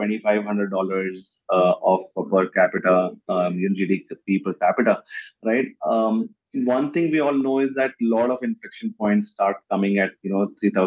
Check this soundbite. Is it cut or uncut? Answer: uncut